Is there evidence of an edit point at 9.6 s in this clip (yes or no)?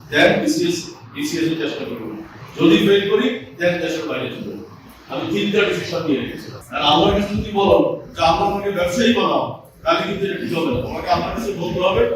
no